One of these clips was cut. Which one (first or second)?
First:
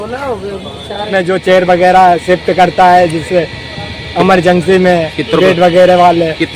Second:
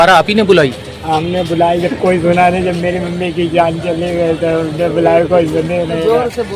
first